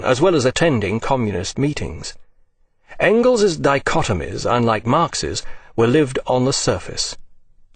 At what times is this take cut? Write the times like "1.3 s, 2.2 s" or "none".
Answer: none